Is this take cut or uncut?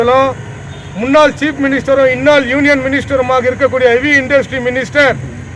uncut